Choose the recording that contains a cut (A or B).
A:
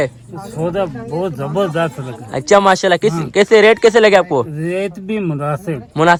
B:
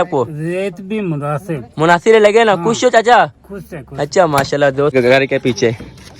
B